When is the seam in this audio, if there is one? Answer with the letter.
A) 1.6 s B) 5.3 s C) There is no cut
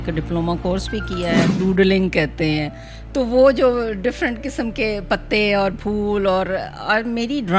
A